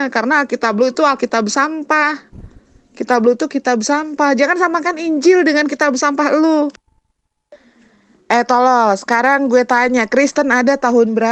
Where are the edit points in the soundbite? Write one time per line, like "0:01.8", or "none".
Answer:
0:07.5